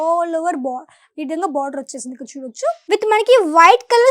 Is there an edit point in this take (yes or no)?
yes